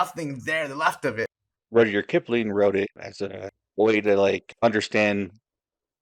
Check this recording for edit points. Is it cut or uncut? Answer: cut